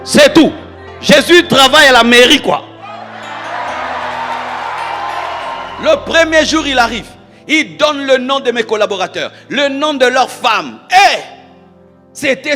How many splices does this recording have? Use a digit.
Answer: 1